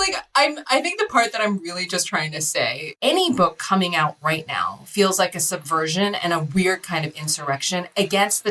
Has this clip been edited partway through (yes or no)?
yes